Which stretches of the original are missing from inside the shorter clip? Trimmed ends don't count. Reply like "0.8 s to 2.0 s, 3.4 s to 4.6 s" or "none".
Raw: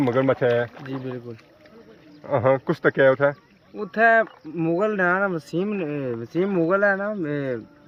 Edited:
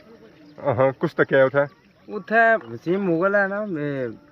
4.4 s to 6.2 s